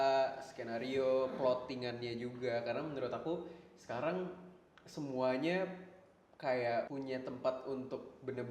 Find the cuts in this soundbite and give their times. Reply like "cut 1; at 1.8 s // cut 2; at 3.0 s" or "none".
cut 1; at 6.9 s